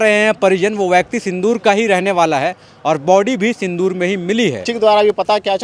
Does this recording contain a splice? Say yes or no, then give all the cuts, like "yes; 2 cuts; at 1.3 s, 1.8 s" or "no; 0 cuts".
yes; 1 cut; at 4.6 s